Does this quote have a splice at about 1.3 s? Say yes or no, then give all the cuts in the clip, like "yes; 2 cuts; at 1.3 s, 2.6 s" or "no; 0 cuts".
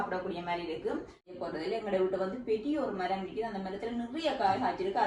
yes; 1 cut; at 1.3 s